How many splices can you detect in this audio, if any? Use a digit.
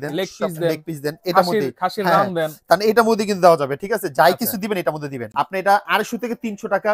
1